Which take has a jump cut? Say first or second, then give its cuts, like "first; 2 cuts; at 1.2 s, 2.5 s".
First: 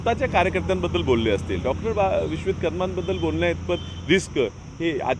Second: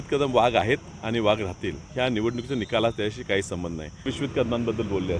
second; 1 cut; at 4.1 s